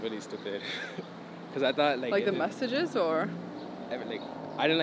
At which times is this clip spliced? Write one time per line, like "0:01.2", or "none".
none

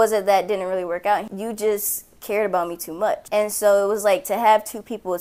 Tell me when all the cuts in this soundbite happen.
0:01.3
0:03.2

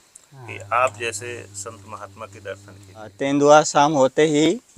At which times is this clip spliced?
0:03.1

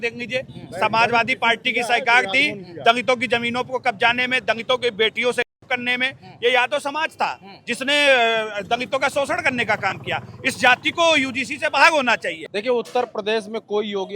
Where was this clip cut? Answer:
0:12.4

